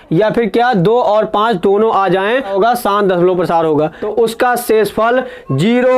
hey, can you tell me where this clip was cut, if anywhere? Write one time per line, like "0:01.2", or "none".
0:02.5
0:04.0